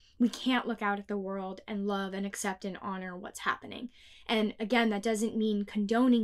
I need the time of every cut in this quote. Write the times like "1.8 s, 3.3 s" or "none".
none